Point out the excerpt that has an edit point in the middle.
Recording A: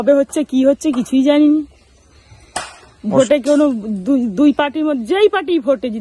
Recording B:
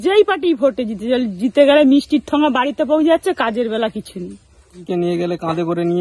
B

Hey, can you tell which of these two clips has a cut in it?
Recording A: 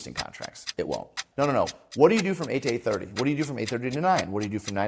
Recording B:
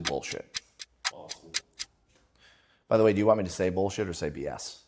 A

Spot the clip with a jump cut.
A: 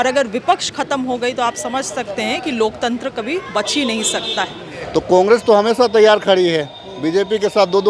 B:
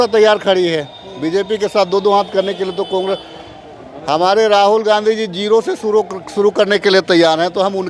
A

